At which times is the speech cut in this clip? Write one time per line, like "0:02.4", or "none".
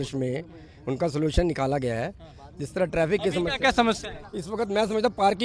none